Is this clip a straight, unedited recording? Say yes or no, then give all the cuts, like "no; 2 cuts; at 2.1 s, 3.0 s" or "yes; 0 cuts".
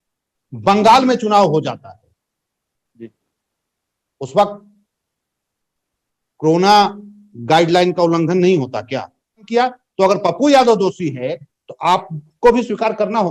no; 1 cut; at 9.5 s